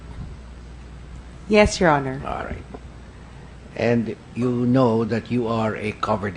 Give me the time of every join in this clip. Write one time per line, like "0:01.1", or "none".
0:05.1